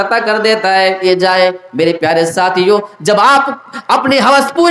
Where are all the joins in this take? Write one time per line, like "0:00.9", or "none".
0:01.0

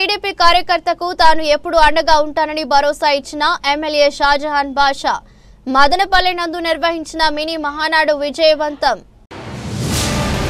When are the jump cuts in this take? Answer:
none

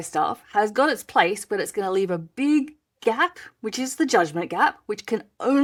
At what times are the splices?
none

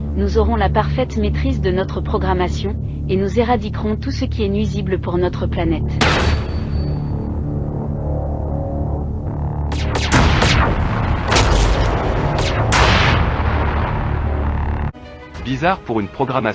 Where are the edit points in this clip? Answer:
0:14.9

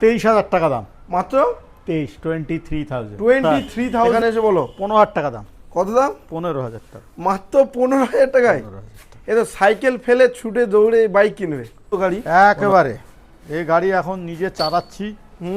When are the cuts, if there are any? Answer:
0:04.1
0:11.9

